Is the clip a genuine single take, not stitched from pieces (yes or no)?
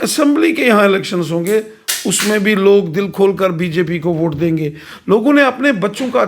yes